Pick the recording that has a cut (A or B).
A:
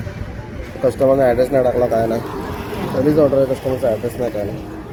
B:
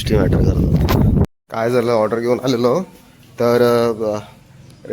B